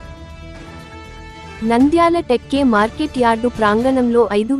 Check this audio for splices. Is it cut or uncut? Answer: cut